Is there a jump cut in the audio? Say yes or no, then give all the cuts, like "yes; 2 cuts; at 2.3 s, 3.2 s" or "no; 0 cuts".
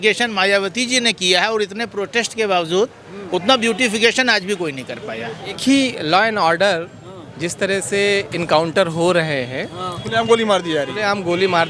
yes; 1 cut; at 5.6 s